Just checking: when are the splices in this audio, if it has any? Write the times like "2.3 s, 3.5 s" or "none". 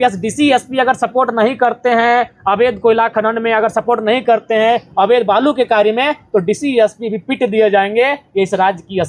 none